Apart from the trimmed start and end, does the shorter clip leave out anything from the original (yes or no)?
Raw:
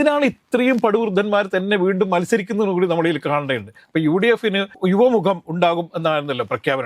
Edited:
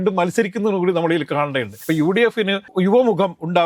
yes